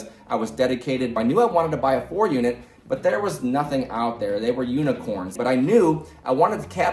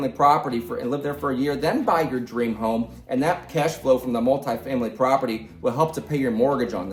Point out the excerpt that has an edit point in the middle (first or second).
first